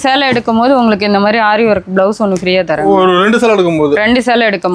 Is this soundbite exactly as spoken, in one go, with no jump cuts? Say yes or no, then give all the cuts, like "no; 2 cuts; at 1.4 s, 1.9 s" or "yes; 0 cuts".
yes; 0 cuts